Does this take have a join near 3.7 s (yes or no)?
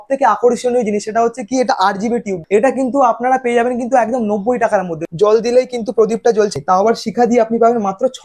no